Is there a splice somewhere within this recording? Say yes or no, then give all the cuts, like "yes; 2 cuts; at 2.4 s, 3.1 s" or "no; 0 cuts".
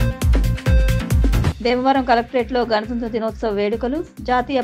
no; 0 cuts